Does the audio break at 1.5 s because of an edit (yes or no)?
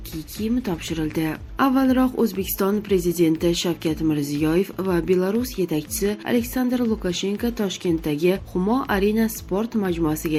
no